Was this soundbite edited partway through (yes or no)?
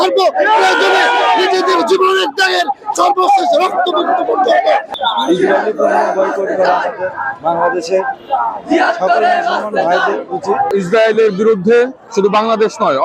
yes